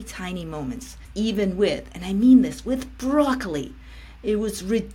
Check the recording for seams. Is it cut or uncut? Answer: cut